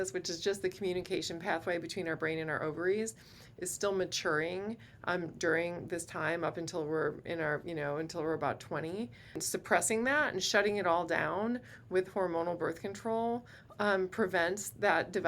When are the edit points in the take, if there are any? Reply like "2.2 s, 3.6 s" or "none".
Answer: 9.4 s

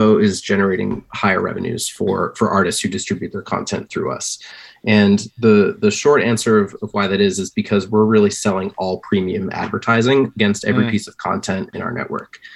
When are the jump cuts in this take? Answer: none

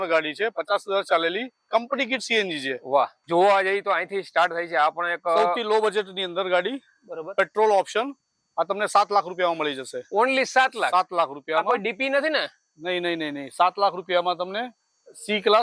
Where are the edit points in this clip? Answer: 3.2 s

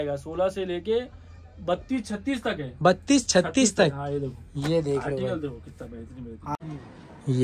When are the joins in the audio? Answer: 6.5 s

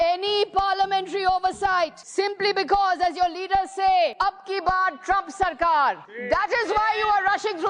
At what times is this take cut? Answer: 2.0 s, 4.1 s, 6.1 s

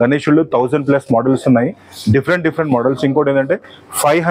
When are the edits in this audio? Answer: none

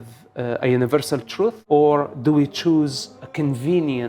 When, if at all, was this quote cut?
1.6 s, 3.2 s

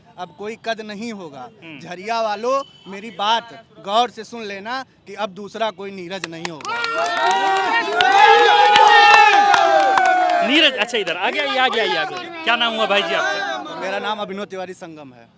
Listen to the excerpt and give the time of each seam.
none

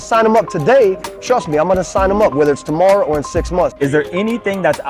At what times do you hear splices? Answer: 3.7 s

